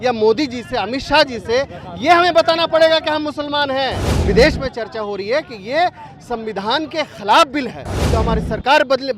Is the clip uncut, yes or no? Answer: no